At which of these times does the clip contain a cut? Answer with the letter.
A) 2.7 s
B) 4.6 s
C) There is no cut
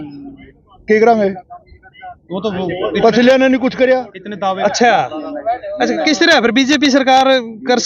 B